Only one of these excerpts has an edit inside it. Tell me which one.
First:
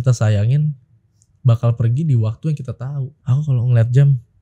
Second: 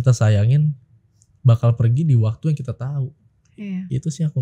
first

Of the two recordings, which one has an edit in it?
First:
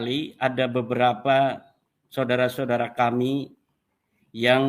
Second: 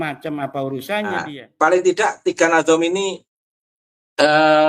second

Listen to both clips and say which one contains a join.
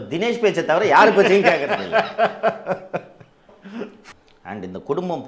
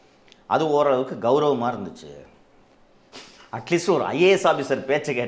first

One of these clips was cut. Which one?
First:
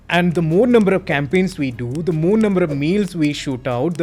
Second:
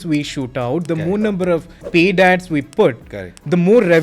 second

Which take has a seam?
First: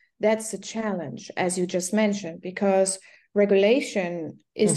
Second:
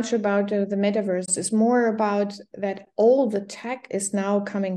second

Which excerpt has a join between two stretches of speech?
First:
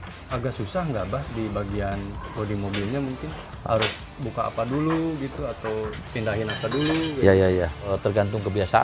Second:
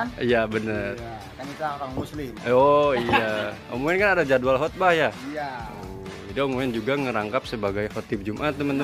first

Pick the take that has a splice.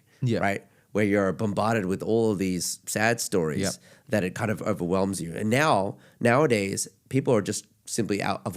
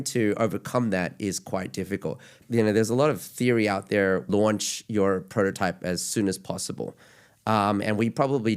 second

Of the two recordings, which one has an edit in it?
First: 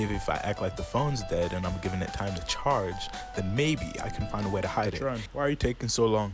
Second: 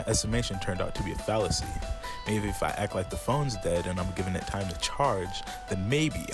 first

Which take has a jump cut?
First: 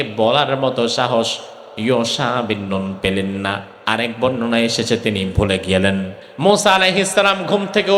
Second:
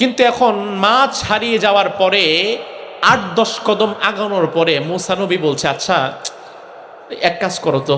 first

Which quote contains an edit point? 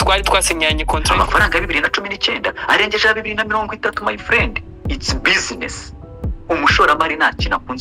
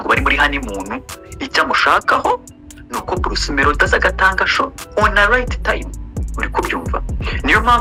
first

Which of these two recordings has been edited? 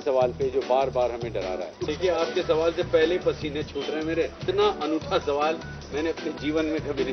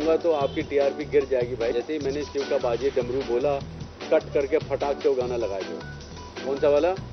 first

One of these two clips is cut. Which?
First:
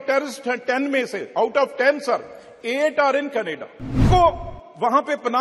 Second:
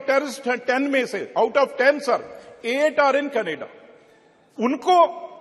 first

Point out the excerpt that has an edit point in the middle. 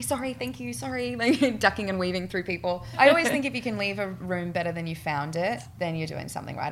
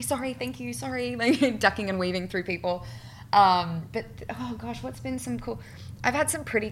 first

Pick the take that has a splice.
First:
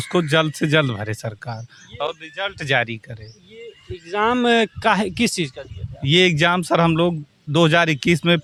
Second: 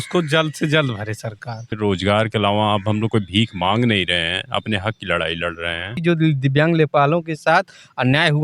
second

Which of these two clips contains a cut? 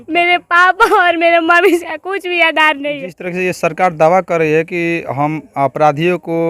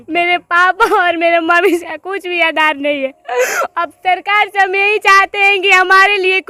first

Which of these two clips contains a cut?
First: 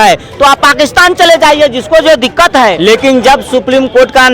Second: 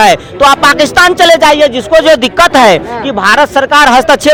first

